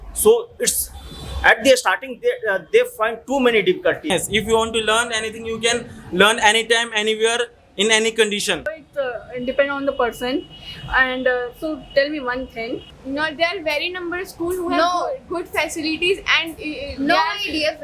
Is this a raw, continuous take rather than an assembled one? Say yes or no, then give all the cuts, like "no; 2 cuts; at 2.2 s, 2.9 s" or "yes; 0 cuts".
no; 3 cuts; at 4.0 s, 8.8 s, 12.9 s